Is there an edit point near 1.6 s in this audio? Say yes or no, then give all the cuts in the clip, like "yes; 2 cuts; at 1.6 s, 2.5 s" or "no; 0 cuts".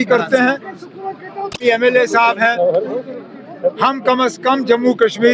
yes; 1 cut; at 1.6 s